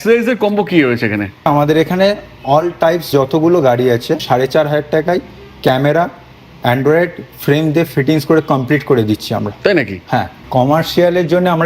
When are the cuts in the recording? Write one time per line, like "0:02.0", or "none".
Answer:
0:01.5
0:03.1
0:04.2
0:10.4